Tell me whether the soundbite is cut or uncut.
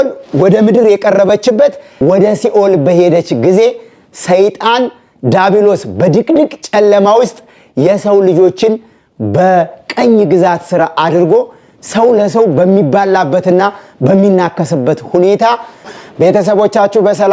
cut